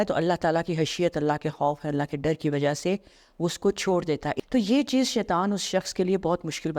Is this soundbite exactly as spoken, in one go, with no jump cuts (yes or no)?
no